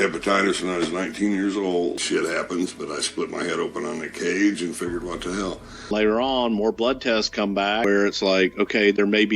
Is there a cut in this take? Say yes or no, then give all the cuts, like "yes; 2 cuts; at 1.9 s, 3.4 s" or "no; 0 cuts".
yes; 3 cuts; at 2.0 s, 5.8 s, 7.8 s